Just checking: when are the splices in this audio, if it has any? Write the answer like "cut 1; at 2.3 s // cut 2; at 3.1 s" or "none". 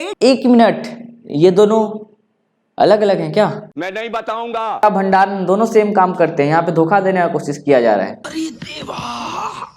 cut 1; at 4.8 s